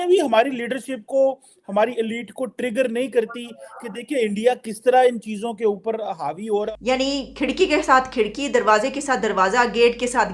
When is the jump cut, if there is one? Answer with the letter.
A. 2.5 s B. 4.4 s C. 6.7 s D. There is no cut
C